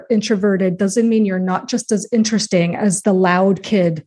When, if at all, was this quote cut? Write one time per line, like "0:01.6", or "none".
0:03.0